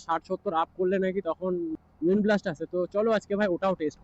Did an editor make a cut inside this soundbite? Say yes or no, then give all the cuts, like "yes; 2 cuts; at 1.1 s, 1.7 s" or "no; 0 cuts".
yes; 1 cut; at 1.8 s